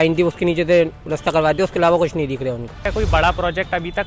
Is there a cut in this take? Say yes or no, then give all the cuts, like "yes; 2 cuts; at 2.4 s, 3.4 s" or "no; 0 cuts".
yes; 1 cut; at 2.8 s